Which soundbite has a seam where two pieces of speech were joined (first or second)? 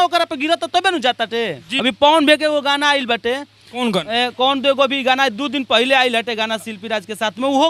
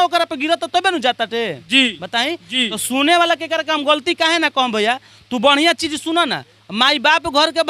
first